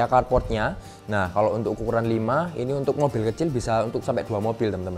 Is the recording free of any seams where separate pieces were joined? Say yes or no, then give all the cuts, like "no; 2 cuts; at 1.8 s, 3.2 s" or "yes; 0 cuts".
yes; 0 cuts